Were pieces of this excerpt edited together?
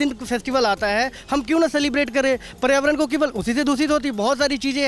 no; 0 cuts

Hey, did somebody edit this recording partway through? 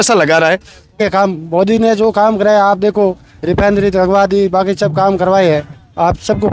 yes; 1 cut; at 1.0 s

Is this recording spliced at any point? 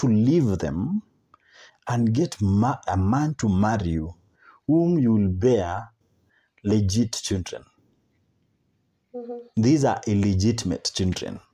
no; 0 cuts

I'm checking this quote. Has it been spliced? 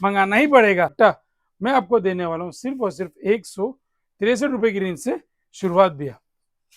yes; 1 cut; at 0.9 s

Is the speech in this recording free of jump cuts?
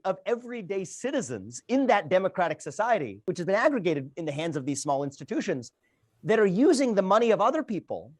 no; 1 cut; at 3.2 s

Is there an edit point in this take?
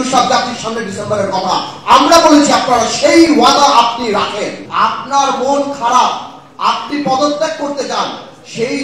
yes; 1 cut; at 4.6 s

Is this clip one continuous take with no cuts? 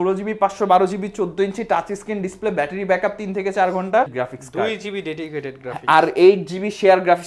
no; 1 cut; at 4.1 s

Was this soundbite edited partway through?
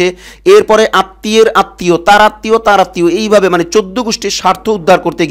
no; 0 cuts

